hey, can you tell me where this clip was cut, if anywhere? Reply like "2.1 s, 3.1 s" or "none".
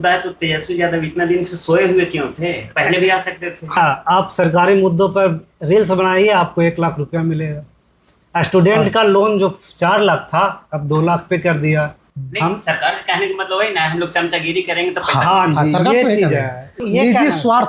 3.8 s, 12.0 s, 16.8 s